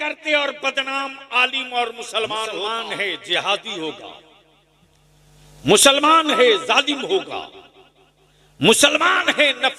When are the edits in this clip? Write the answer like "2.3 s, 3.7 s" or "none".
2.9 s